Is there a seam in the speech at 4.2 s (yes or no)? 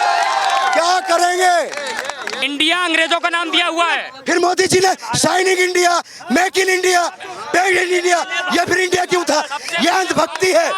no